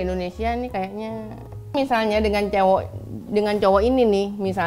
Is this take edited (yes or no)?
yes